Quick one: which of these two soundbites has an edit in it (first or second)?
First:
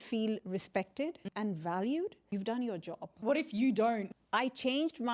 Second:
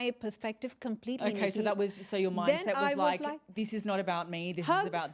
first